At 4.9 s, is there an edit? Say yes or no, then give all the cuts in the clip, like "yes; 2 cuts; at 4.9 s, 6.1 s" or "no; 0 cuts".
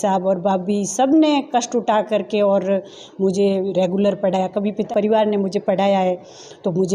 yes; 1 cut; at 4.9 s